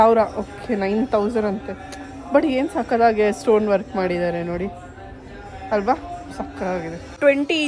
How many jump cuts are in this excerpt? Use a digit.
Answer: 0